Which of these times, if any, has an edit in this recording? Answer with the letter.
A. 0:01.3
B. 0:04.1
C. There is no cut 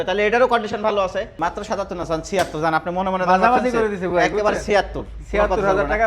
A